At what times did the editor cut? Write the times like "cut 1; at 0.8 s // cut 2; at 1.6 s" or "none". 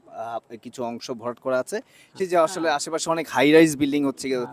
cut 1; at 2.2 s